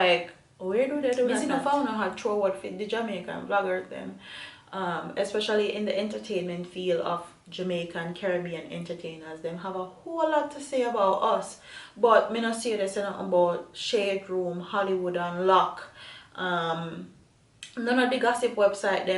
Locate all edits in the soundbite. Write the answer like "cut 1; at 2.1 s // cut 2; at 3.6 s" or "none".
cut 1; at 1.3 s